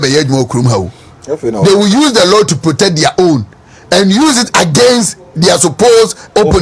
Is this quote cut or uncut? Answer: uncut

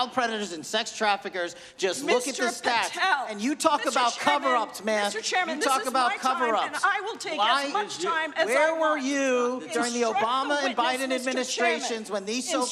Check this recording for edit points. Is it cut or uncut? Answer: uncut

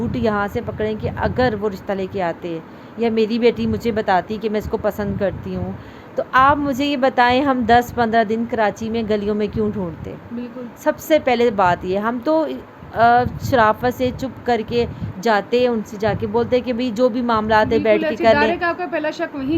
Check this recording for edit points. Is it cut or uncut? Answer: uncut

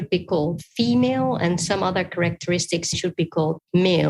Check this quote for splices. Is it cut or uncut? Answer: cut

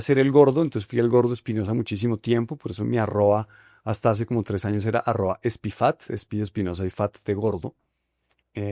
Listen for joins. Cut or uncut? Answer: uncut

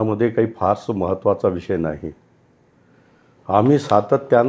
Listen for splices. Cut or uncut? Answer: uncut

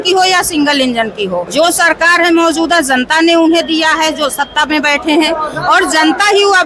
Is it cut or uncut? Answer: cut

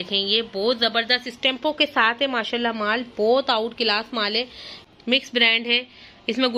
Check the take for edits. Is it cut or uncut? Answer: cut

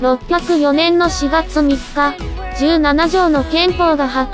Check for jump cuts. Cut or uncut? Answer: uncut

